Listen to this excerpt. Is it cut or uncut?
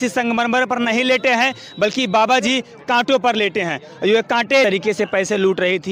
cut